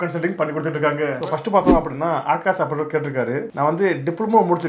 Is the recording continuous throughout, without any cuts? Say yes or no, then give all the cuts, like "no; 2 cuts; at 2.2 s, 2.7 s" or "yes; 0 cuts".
no; 1 cut; at 1.2 s